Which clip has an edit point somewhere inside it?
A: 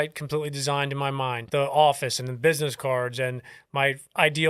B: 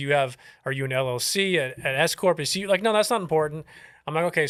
A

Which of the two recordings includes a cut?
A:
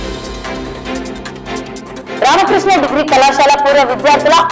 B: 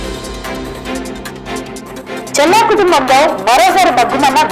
A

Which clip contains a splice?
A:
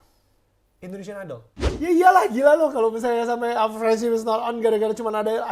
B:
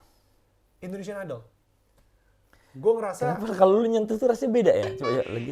A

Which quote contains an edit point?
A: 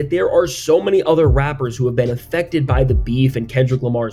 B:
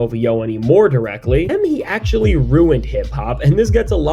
B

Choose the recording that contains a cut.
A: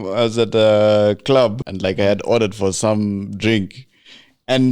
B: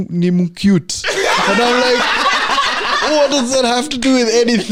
A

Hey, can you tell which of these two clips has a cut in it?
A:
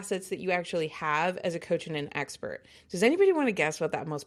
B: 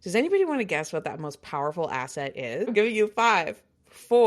B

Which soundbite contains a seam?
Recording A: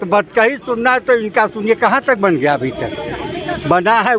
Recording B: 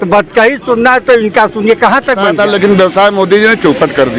B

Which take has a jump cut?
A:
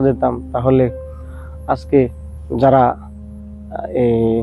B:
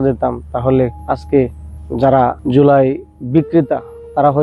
B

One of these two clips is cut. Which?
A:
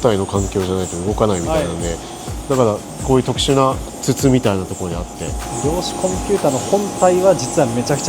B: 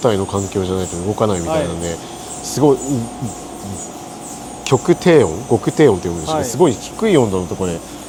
A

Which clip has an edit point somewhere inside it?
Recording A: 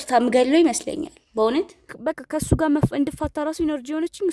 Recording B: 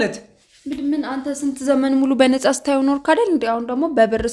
A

